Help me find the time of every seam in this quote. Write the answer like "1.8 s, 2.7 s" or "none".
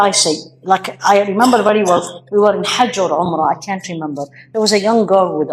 none